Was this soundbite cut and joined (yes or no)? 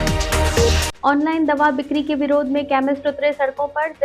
yes